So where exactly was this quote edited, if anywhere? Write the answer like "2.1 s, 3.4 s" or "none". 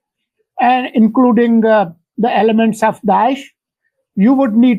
none